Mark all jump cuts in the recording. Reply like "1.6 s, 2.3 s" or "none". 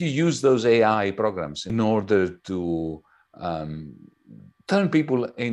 1.6 s

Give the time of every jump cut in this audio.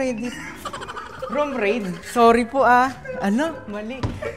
none

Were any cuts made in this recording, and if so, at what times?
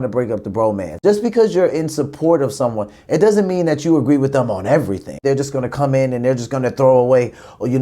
1.0 s, 5.2 s

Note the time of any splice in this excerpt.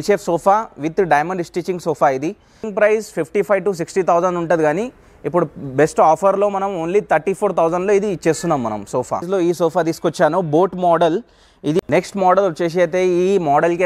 2.7 s, 9.3 s, 11.8 s

